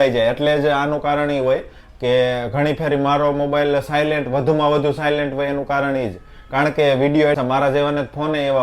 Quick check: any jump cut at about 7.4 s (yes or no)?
yes